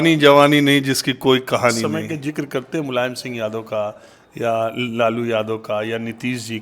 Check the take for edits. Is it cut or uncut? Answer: cut